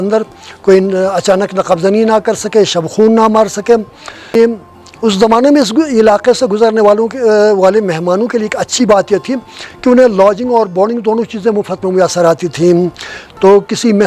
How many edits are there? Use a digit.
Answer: 1